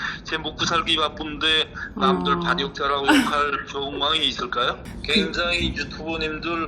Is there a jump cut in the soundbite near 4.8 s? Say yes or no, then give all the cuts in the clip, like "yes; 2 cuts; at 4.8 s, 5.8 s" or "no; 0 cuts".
yes; 1 cut; at 4.8 s